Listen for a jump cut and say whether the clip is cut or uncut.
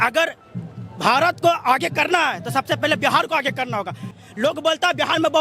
cut